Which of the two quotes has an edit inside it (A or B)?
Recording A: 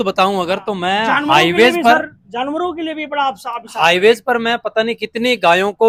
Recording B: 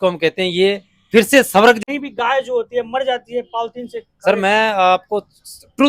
B